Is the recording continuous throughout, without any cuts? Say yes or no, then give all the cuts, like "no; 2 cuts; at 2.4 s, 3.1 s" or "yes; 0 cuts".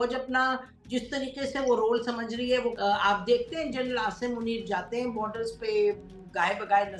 no; 1 cut; at 2.8 s